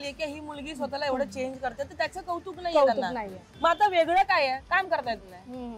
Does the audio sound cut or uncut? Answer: uncut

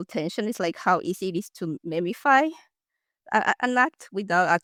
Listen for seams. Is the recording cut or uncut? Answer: uncut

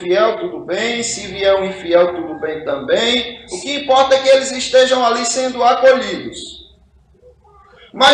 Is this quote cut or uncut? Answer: uncut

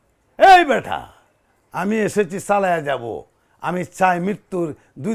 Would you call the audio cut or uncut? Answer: uncut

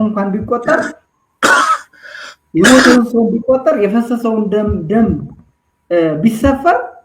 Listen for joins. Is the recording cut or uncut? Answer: uncut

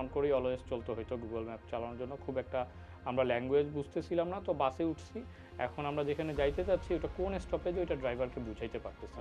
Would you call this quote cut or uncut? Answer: uncut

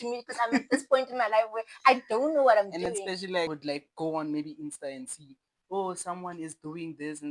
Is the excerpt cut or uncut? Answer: cut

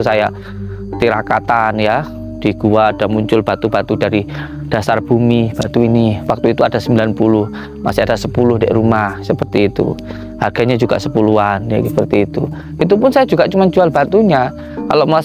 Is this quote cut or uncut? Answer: uncut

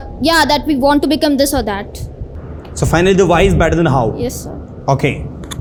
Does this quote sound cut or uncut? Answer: uncut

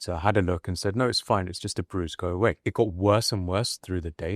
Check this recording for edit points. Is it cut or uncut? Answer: cut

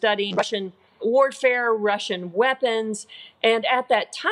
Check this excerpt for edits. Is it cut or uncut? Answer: cut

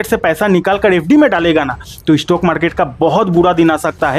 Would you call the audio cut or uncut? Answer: uncut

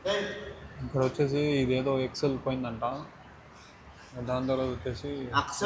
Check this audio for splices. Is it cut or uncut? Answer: uncut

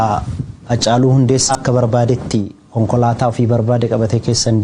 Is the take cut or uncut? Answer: cut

